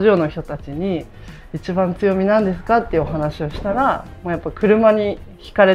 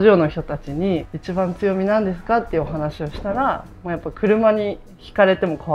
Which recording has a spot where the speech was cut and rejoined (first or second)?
second